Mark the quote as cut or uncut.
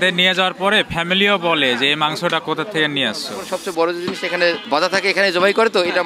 cut